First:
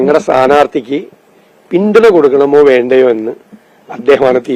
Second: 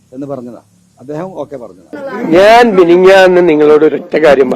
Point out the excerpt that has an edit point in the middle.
second; 1 cut; at 1.8 s

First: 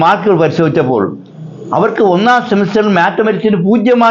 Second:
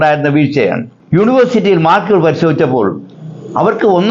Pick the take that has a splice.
second; 1 cut; at 0.9 s

